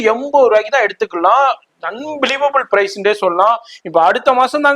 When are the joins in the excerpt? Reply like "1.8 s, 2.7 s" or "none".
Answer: none